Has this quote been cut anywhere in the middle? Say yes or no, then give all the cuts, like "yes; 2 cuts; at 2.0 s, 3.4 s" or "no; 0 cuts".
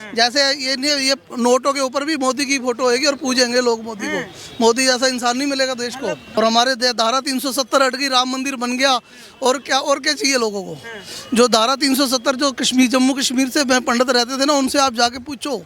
yes; 1 cut; at 6.4 s